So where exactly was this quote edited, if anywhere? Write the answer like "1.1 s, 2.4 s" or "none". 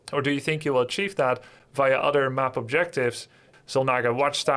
3.5 s